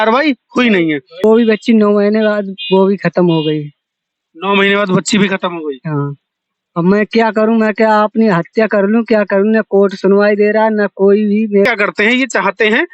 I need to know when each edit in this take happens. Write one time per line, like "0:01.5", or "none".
0:01.2
0:11.7